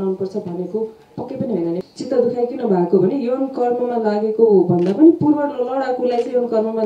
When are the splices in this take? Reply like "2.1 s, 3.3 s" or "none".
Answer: 1.8 s